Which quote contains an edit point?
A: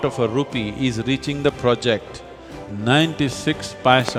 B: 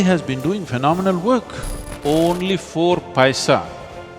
B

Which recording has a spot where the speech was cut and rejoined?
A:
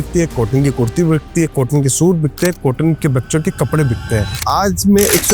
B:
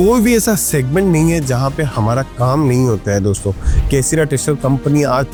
A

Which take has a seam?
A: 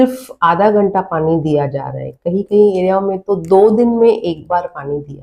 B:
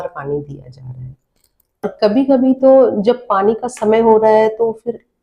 B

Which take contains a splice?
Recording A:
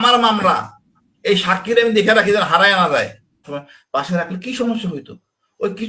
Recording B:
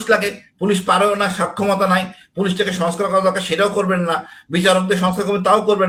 A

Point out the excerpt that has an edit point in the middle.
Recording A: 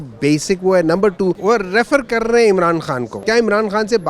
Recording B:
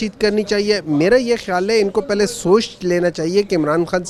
A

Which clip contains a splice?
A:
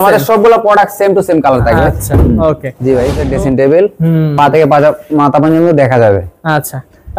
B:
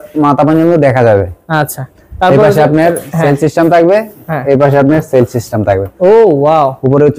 A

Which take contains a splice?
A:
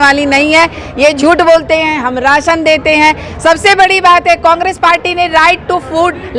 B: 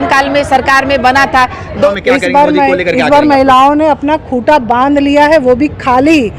B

